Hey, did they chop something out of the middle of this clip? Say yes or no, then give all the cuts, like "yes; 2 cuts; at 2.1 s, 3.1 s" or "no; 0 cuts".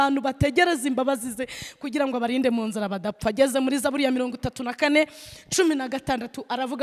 no; 0 cuts